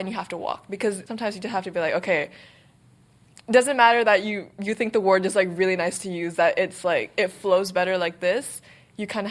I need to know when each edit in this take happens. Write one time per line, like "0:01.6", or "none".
0:01.1